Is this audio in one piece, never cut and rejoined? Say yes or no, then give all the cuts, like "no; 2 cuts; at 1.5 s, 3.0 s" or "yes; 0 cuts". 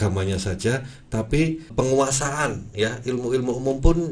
no; 1 cut; at 1.7 s